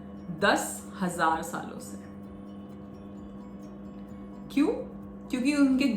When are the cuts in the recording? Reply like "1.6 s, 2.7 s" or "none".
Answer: none